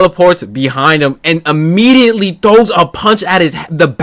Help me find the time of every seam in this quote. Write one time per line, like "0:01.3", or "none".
none